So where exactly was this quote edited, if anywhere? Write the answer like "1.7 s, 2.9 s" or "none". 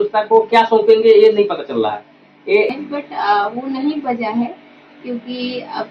2.7 s